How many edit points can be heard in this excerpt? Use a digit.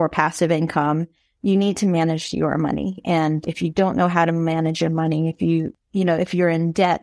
2